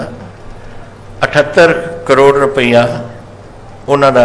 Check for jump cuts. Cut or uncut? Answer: uncut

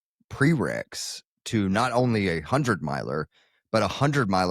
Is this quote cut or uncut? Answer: uncut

